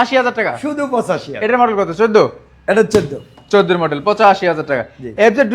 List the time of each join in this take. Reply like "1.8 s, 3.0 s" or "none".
none